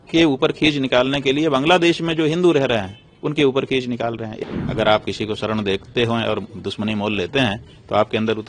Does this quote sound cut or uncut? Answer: cut